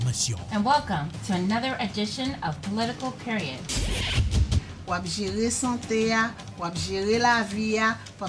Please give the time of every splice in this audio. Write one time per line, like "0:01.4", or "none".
0:02.8